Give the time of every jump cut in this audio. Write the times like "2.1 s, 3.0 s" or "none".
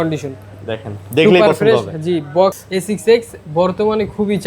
2.6 s

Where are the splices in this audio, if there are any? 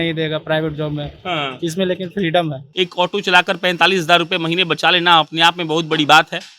2.6 s

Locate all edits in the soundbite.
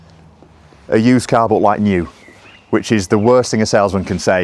none

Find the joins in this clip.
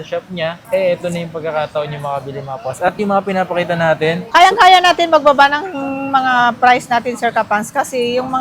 4.2 s

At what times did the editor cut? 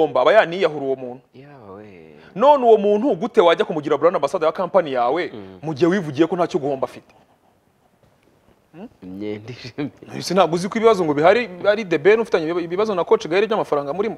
8.0 s

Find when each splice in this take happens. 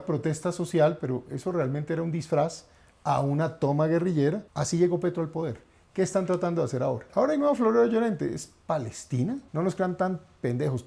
4.5 s, 7.1 s, 9.5 s

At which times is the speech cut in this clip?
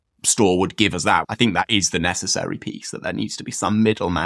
1.3 s

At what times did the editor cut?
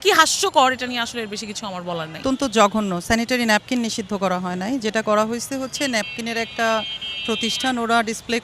none

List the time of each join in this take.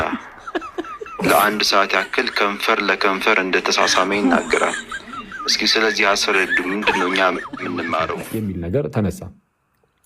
8.2 s

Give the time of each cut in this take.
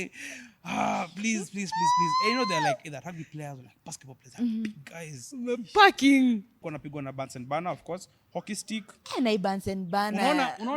6.6 s

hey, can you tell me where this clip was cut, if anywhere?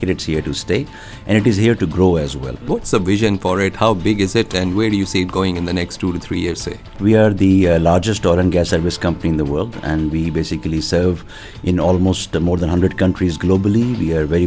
2.6 s, 7.0 s

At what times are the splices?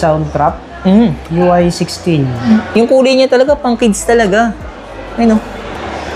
2.4 s

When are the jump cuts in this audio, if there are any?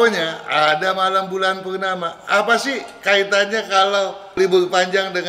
4.4 s

